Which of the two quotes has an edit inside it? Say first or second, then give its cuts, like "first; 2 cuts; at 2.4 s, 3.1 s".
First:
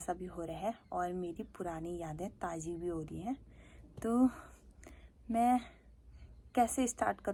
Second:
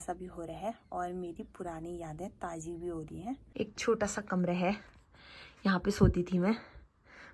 second; 1 cut; at 3.5 s